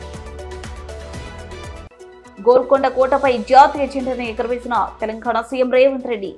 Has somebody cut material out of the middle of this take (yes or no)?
yes